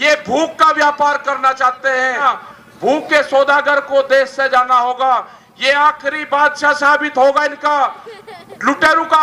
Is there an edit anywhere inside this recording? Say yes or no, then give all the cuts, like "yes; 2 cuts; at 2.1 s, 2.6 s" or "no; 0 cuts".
yes; 1 cut; at 2.2 s